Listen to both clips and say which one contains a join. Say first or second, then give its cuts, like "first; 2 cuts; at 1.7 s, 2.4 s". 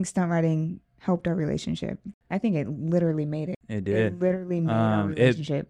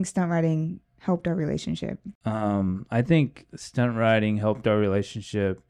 first; 2 cuts; at 2.1 s, 3.6 s